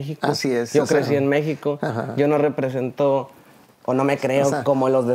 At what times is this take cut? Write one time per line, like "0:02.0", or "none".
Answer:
none